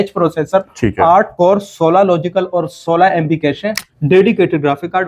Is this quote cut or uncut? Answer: cut